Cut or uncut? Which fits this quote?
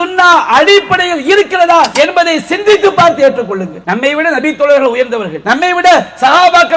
cut